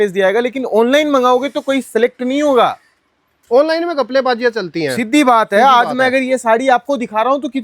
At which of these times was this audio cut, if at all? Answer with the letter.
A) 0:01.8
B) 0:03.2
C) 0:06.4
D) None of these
D